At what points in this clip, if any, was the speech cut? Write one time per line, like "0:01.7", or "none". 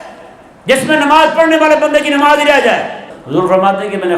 0:03.1